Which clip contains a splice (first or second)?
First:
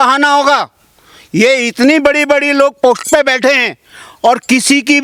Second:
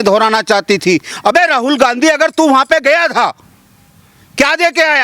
second